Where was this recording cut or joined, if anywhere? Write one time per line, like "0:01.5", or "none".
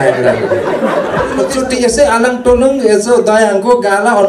0:01.4